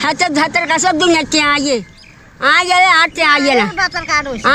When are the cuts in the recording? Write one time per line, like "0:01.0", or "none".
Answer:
none